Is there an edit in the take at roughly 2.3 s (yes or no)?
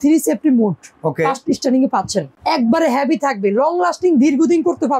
yes